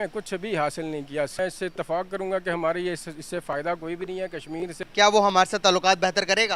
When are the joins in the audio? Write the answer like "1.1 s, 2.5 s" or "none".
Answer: 1.4 s, 4.7 s